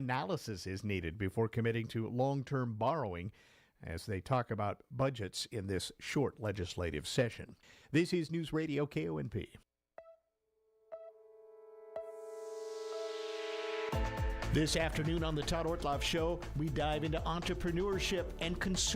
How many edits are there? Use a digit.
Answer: 1